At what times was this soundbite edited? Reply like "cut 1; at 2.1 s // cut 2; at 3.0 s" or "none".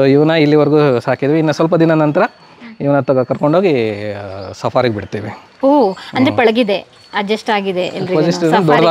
none